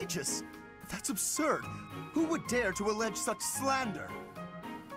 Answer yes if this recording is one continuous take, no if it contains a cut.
no